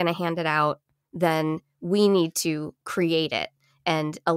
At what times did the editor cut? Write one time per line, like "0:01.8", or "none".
none